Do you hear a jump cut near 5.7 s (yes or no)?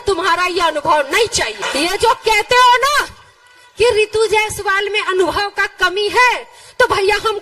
no